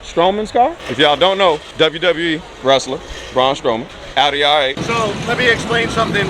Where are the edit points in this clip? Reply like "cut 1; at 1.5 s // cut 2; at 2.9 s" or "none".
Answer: cut 1; at 0.8 s // cut 2; at 1.7 s // cut 3; at 4.0 s // cut 4; at 4.8 s